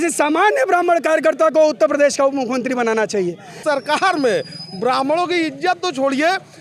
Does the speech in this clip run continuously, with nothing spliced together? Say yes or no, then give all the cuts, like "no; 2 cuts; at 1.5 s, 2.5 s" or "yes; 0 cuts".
no; 1 cut; at 3.6 s